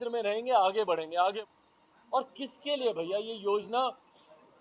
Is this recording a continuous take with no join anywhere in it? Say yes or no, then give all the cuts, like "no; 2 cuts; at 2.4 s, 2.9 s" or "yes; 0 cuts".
no; 1 cut; at 1.3 s